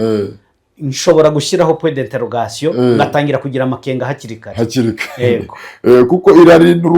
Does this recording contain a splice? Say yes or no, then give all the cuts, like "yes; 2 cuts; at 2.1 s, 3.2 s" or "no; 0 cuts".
no; 0 cuts